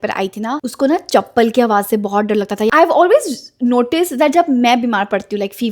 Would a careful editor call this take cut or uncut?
cut